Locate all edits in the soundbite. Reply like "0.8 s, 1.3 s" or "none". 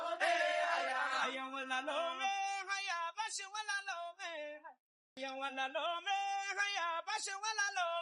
5.2 s